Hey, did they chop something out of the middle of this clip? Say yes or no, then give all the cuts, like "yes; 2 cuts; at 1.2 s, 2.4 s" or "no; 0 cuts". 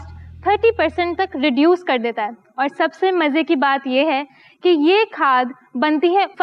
no; 0 cuts